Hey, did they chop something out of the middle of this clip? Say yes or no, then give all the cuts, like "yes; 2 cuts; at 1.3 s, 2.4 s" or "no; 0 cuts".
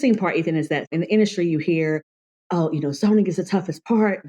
yes; 1 cut; at 0.9 s